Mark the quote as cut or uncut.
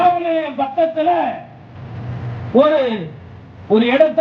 uncut